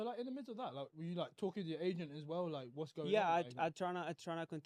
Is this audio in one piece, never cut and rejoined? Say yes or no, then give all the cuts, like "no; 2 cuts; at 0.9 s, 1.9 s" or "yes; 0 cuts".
yes; 0 cuts